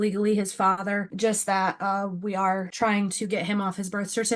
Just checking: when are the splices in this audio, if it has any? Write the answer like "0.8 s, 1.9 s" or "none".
1.1 s, 2.7 s

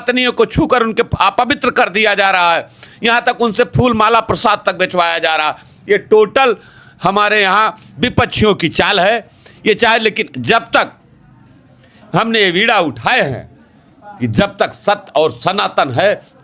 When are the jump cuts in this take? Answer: none

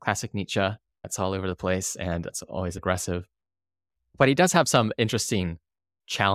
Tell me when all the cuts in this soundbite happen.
1.1 s

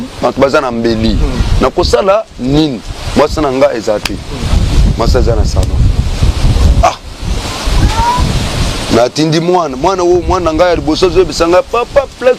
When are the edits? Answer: none

